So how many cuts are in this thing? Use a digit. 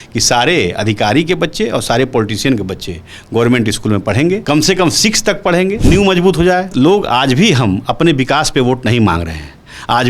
3